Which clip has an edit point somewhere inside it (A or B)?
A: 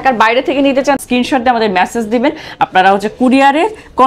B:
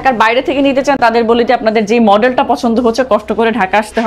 A